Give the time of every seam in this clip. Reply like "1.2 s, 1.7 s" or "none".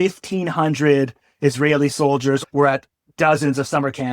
2.4 s